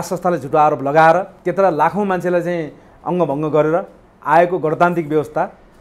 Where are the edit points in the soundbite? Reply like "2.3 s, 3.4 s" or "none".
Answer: 1.4 s